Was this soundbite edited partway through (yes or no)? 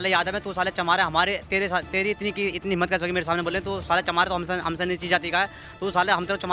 no